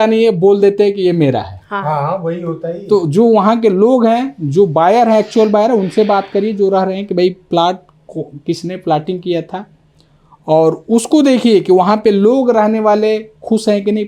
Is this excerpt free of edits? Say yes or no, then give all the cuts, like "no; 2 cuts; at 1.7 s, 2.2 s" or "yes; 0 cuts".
yes; 0 cuts